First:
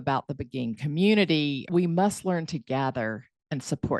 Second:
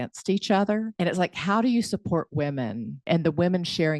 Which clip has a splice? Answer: second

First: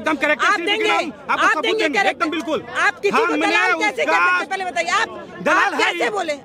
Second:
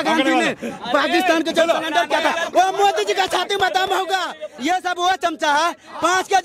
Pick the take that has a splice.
second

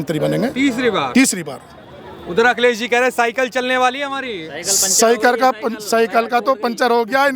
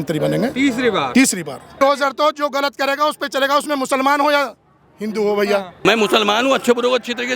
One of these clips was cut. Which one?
second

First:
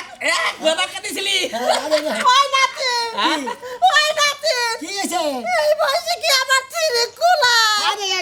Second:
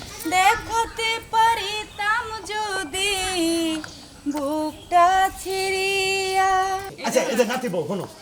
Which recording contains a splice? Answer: second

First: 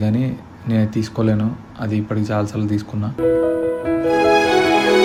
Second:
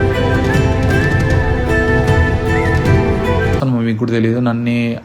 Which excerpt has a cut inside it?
second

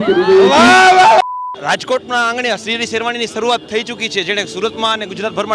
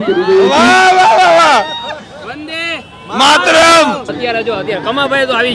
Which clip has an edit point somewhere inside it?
first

